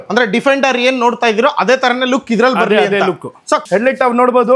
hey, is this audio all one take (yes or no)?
no